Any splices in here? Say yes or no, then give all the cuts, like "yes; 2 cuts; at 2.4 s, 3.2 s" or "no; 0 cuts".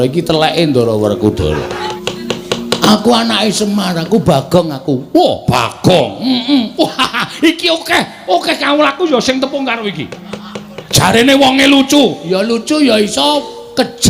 yes; 1 cut; at 1.9 s